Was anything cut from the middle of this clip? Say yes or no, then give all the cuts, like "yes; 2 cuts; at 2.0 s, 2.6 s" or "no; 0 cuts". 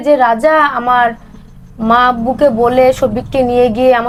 no; 0 cuts